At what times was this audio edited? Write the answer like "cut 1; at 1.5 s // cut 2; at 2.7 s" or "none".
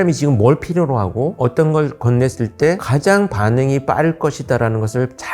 cut 1; at 1.3 s // cut 2; at 2.9 s